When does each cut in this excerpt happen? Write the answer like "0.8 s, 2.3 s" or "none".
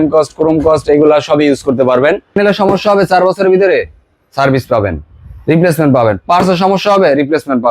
2.4 s